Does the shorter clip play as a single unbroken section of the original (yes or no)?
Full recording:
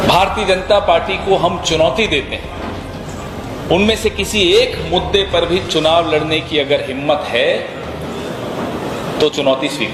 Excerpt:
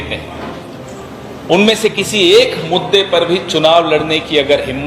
yes